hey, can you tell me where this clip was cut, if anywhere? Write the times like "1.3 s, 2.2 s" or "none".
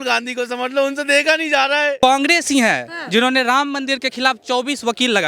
2.0 s